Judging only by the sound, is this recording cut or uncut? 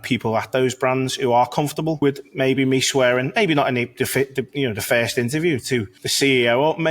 cut